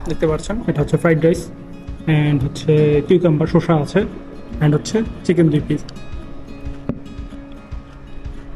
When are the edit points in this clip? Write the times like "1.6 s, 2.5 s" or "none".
none